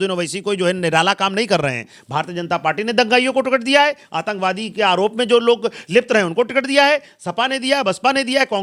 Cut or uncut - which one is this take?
uncut